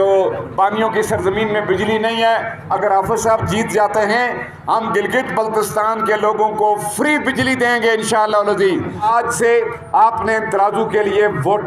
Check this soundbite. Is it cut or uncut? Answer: cut